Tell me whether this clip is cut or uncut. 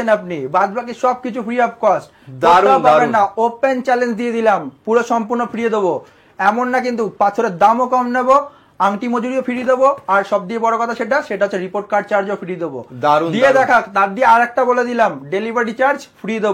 uncut